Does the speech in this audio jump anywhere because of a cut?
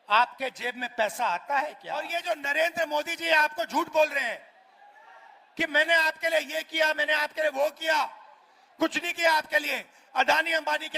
yes; 1 cut; at 2.1 s

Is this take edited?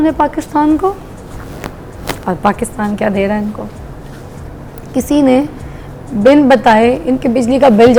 no; 0 cuts

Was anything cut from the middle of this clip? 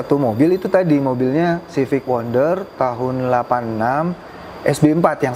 no; 0 cuts

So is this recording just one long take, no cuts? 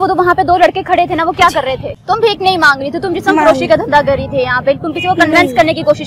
no; 1 cut; at 1.9 s

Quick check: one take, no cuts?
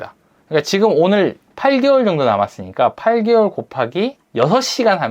no; 2 cuts; at 1.4 s, 4.2 s

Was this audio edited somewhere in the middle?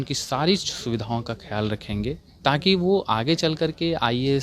no; 0 cuts

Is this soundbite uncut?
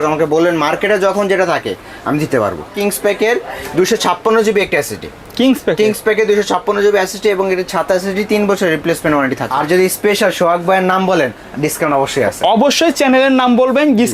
no; 2 cuts; at 2.8 s, 9.5 s

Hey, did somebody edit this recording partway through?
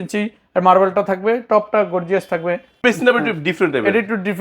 yes; 1 cut; at 2.8 s

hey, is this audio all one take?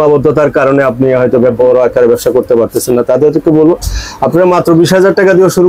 yes; 0 cuts

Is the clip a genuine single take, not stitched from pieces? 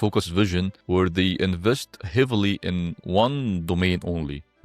yes; 0 cuts

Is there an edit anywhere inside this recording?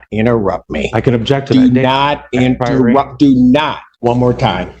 yes; 1 cut; at 3.8 s

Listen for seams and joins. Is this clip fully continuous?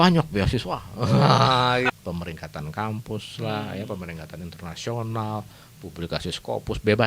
no; 1 cut; at 1.9 s

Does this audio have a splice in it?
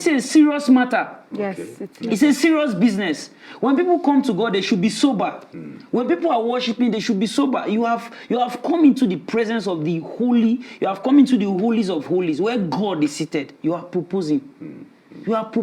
no; 0 cuts

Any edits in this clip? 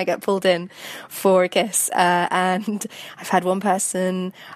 no; 0 cuts

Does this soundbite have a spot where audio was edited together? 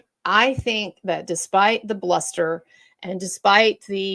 no; 0 cuts

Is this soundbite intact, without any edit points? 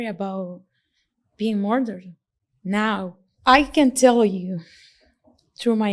no; 1 cut; at 3.2 s

